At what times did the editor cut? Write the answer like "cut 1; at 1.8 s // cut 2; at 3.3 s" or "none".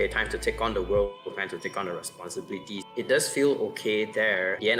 none

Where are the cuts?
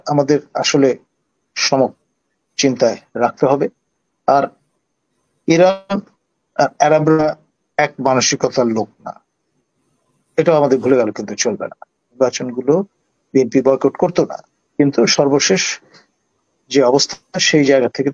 cut 1; at 12.2 s

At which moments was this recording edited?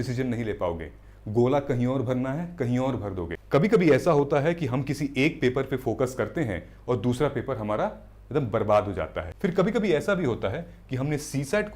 cut 1; at 3.3 s // cut 2; at 9.2 s

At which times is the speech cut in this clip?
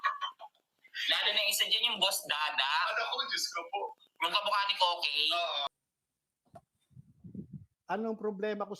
cut 1; at 5.7 s

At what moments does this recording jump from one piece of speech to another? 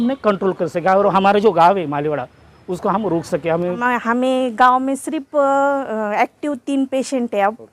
cut 1; at 3.8 s

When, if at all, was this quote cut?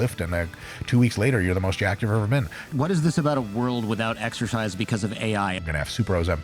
cut 1; at 2.6 s // cut 2; at 5.6 s

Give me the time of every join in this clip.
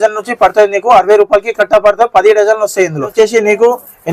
cut 1; at 3.1 s

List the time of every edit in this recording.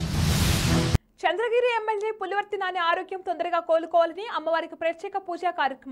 cut 1; at 1.0 s

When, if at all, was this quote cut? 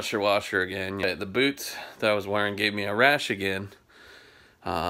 cut 1; at 1.0 s

